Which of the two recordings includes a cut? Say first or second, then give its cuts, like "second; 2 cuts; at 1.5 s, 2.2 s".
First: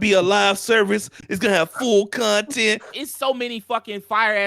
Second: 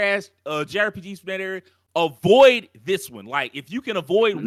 first; 1 cut; at 2.9 s